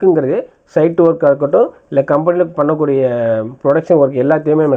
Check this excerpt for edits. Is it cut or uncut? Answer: uncut